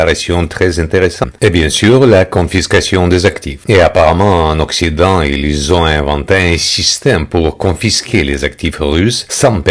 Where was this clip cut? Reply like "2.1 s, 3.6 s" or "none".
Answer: 1.2 s

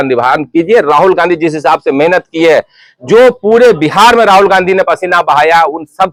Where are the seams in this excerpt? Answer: none

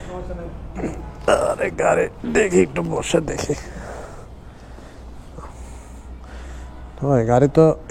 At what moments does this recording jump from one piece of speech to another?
none

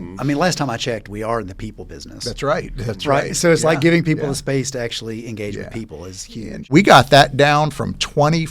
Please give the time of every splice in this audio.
6.7 s

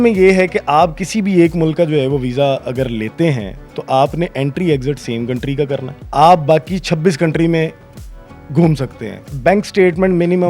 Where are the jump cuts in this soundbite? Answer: 6.0 s, 9.3 s

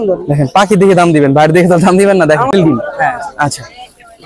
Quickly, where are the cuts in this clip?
2.5 s

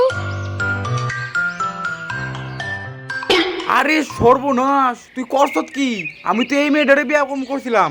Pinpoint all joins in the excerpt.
none

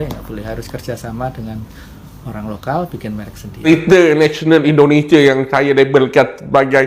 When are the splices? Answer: 3.6 s

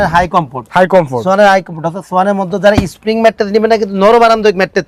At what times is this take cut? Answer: none

